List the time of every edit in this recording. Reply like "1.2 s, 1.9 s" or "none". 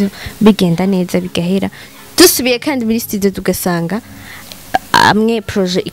none